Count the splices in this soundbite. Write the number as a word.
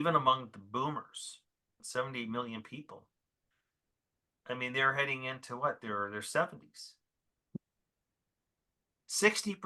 one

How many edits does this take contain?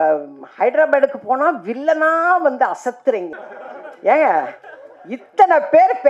one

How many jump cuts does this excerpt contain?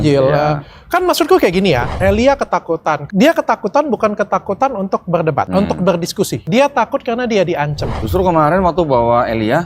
five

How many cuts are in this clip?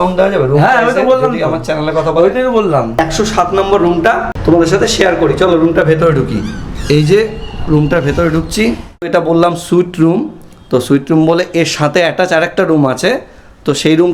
three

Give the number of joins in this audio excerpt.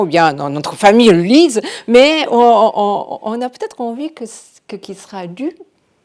zero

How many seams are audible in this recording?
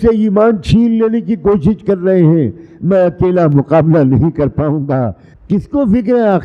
one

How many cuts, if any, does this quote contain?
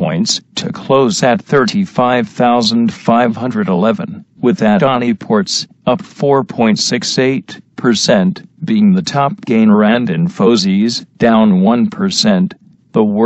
one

